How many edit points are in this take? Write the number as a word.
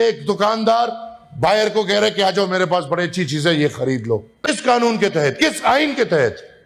one